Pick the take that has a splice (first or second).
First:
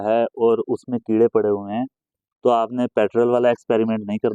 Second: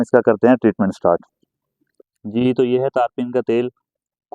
second